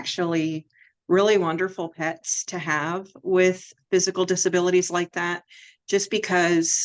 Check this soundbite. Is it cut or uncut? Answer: uncut